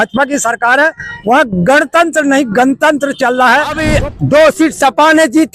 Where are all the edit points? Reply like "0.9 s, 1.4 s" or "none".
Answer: 3.9 s